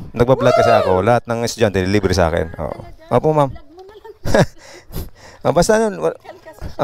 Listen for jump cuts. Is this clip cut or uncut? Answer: uncut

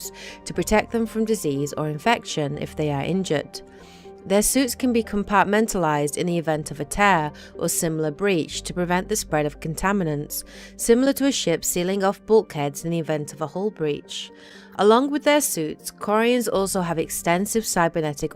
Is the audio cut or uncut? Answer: cut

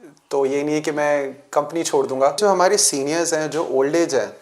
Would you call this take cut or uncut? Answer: cut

